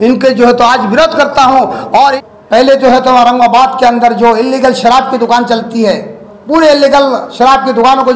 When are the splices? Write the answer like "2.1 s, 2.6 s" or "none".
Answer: 2.2 s